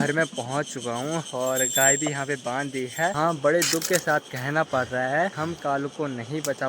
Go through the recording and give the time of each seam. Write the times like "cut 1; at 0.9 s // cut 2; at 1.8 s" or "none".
cut 1; at 3.1 s // cut 2; at 5.4 s